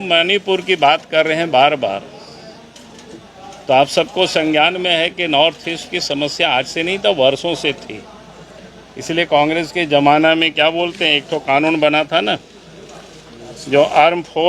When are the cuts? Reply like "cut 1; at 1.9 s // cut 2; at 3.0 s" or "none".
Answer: none